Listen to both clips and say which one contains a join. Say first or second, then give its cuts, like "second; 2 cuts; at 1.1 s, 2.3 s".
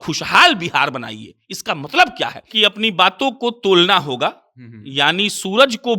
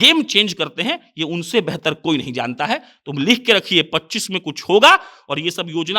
first; 1 cut; at 2.5 s